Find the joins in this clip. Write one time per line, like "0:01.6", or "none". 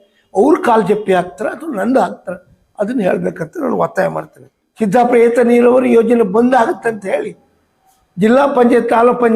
0:04.4